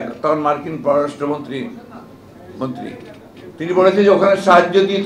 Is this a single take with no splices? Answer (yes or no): yes